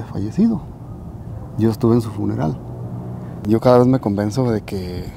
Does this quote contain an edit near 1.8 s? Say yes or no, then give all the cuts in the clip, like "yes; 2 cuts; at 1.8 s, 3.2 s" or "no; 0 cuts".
no; 1 cut; at 3.4 s